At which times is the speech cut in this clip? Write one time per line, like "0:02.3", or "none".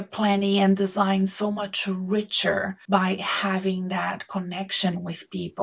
0:02.8